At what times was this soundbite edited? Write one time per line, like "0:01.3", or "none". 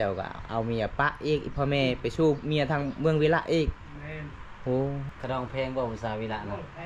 0:05.1